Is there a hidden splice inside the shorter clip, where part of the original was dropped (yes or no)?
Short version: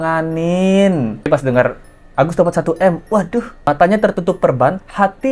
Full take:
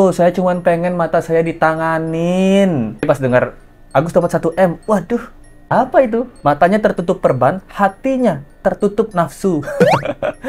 yes